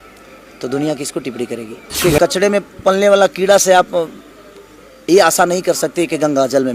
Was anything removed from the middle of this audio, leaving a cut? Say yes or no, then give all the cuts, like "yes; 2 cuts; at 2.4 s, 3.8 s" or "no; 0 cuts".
yes; 1 cut; at 2.0 s